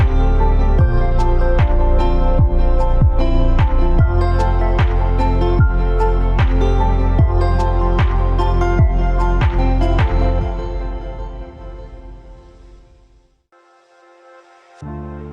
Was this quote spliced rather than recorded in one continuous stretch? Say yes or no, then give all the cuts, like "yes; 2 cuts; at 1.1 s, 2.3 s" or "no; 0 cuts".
yes; 1 cut; at 13.5 s